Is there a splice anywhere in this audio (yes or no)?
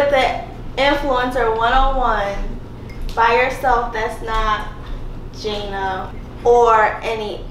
yes